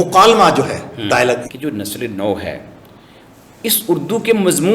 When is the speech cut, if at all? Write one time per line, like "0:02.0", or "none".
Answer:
0:01.4